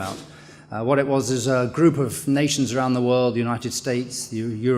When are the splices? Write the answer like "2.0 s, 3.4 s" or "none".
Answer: 2.2 s